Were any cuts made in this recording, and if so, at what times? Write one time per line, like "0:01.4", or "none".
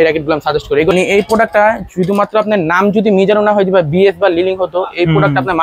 0:00.9